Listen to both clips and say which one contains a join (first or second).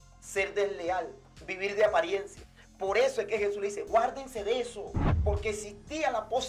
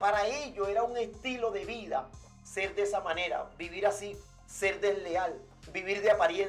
first